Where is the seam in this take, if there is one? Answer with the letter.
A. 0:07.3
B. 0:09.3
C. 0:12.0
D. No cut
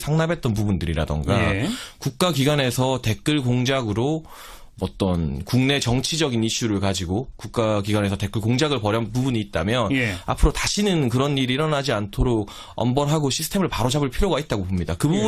C